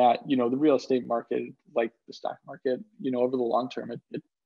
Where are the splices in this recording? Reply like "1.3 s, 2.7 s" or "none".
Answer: none